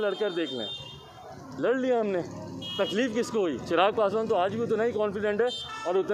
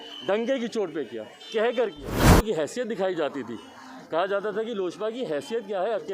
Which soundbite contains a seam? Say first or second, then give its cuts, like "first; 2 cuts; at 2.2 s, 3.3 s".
second; 1 cut; at 2.3 s